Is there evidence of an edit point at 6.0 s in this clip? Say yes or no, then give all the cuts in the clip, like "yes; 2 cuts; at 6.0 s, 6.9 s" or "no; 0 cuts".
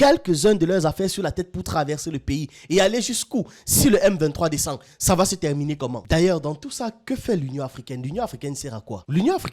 yes; 1 cut; at 6.0 s